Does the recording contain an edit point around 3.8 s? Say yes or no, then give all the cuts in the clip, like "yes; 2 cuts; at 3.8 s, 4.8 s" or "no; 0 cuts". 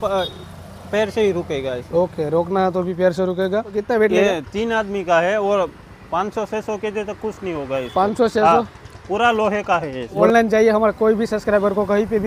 yes; 2 cuts; at 3.8 s, 10.2 s